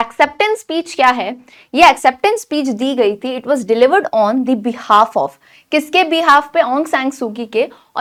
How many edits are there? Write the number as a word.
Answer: zero